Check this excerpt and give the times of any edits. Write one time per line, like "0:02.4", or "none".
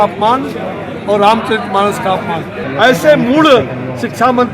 0:02.5